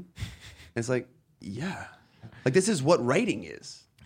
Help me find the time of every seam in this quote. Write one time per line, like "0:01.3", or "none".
0:02.3